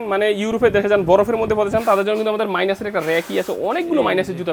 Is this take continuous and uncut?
yes; 0 cuts

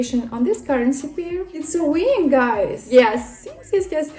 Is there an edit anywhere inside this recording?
yes; 2 cuts; at 1.5 s, 2.8 s

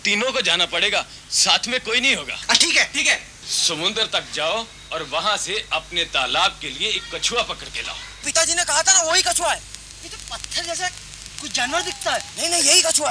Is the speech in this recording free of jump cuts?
no; 2 cuts; at 3.4 s, 8.3 s

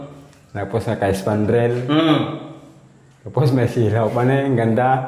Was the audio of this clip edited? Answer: no; 0 cuts

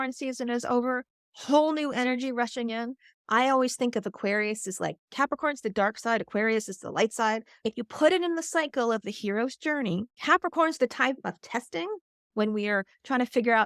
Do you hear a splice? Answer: yes; 2 cuts; at 7.5 s, 10.1 s

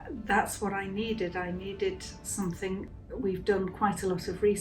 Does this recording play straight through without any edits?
no; 1 cut; at 2.9 s

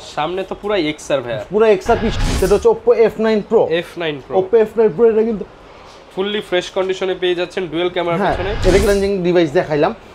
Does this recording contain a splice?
yes; 2 cuts; at 2.1 s, 8.9 s

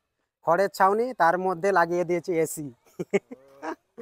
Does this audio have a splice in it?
no; 0 cuts

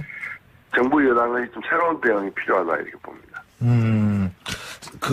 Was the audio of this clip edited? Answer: no; 0 cuts

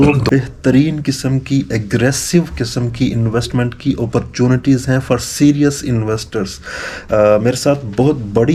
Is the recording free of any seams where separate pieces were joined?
yes; 0 cuts

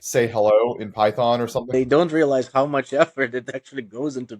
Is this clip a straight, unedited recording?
no; 1 cut; at 1.7 s

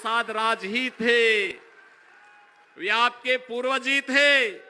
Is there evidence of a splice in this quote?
yes; 1 cut; at 1.5 s

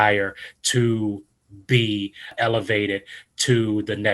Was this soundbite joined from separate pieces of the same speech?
yes; 1 cut; at 2.3 s

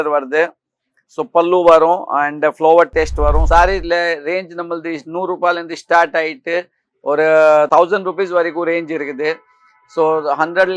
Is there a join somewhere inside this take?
yes; 1 cut; at 3.4 s

